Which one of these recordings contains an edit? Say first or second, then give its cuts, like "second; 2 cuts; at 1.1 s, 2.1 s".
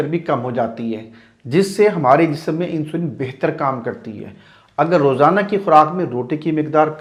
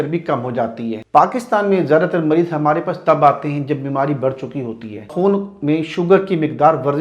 second; 2 cuts; at 1.0 s, 5.1 s